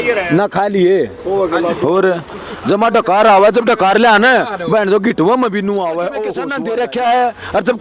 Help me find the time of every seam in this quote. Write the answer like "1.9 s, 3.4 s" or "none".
6.4 s